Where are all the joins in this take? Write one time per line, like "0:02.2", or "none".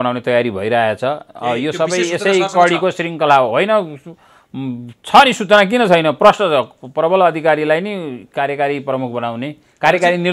none

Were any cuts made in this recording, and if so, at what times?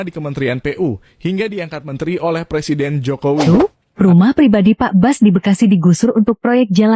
0:03.5

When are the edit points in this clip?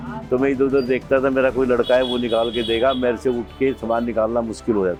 none

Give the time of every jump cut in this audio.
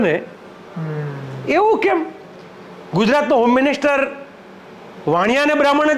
none

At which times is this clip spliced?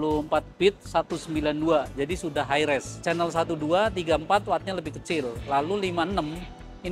0:03.0

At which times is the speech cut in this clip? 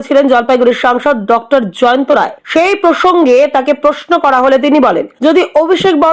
0:02.4
0:05.1

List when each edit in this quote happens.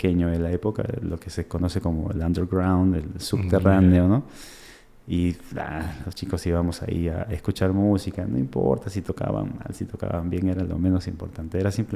none

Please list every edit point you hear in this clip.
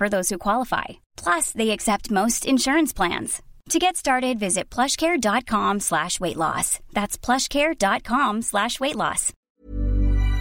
0:09.3

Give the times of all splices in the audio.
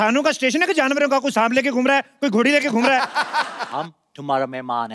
0:03.6

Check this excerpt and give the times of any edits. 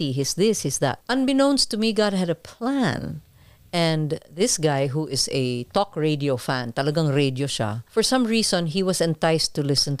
0:01.0
0:07.8

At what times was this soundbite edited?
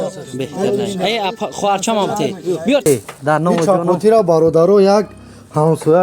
0:02.9

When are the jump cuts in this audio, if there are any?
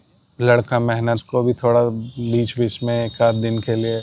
0:01.2

